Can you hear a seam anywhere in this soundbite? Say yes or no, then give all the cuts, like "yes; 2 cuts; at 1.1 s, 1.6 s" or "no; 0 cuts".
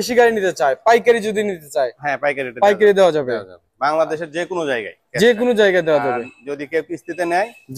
no; 0 cuts